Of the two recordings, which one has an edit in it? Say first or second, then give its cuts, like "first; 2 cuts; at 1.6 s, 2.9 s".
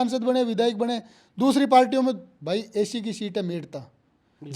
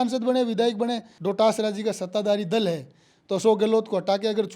second; 1 cut; at 1.1 s